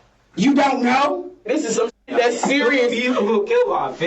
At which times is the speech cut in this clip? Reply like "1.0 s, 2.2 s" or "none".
1.5 s